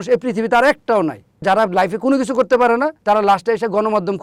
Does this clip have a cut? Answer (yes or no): yes